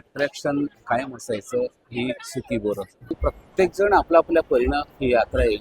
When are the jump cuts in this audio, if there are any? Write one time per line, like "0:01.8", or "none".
0:03.2